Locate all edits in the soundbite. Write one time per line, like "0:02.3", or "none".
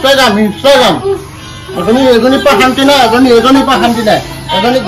none